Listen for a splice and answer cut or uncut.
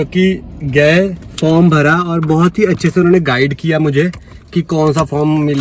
uncut